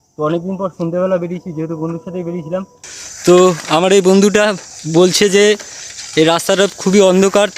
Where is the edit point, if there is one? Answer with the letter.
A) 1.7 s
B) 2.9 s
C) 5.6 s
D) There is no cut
B